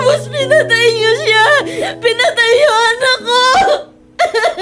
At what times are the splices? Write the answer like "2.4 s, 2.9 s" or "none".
none